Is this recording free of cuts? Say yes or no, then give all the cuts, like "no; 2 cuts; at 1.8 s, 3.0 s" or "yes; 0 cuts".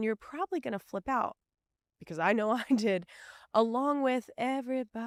yes; 0 cuts